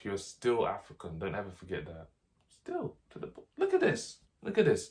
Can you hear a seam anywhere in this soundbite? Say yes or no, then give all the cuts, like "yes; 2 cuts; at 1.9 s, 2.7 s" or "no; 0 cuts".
no; 0 cuts